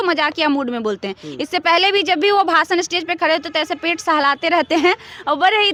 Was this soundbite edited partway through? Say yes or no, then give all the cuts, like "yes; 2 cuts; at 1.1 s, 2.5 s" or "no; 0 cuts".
no; 0 cuts